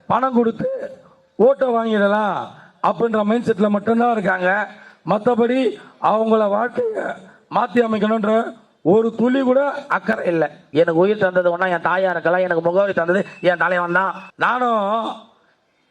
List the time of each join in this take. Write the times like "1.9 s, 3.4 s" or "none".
10.6 s, 14.2 s